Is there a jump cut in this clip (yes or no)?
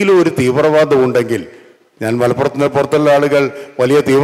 no